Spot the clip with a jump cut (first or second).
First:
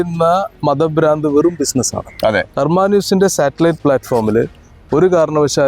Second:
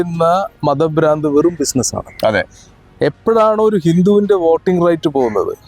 first